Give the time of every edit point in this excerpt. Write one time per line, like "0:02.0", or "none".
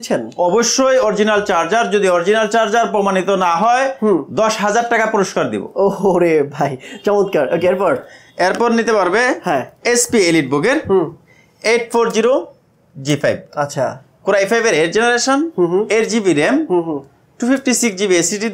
none